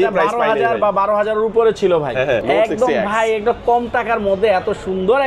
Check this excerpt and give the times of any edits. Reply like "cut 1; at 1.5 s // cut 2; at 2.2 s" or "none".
cut 1; at 2.4 s